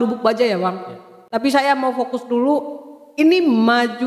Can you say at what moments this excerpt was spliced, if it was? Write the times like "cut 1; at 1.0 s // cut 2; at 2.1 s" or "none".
none